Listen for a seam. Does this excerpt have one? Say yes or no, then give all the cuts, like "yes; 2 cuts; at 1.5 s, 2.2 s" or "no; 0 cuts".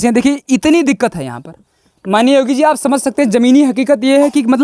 no; 0 cuts